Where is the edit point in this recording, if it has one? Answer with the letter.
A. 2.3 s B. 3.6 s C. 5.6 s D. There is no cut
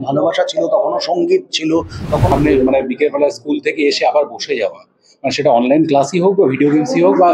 A